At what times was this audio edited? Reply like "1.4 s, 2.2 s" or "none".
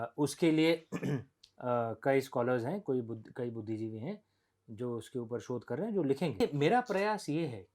6.4 s